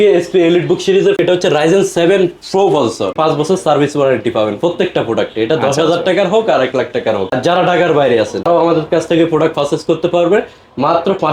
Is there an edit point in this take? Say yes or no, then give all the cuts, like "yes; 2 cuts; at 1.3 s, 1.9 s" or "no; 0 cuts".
yes; 4 cuts; at 1.2 s, 3.1 s, 7.3 s, 8.4 s